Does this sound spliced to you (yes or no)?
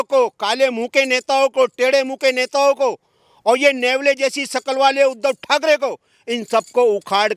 no